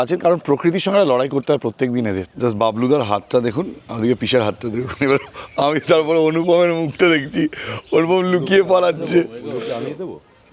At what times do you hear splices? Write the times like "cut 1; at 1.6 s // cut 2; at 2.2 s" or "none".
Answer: cut 1; at 2.4 s